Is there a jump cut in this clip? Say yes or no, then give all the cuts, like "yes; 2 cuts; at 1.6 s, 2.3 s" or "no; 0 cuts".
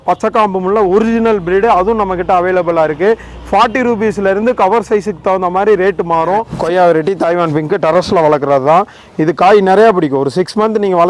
yes; 1 cut; at 6.5 s